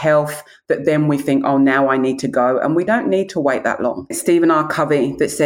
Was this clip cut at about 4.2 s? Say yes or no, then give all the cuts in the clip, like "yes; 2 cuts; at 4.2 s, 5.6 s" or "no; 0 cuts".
yes; 2 cuts; at 2.9 s, 4.2 s